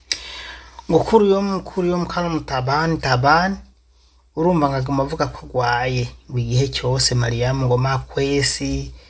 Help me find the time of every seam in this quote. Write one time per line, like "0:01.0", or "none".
none